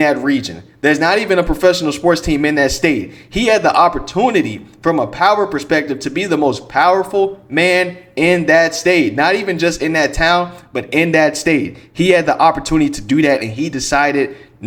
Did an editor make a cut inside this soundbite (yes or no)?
no